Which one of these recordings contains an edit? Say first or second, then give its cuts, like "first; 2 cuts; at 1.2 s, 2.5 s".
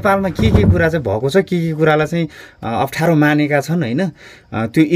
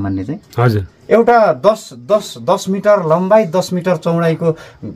second; 1 cut; at 0.9 s